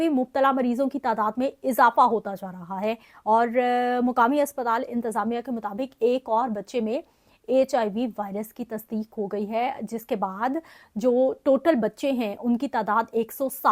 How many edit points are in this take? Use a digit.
0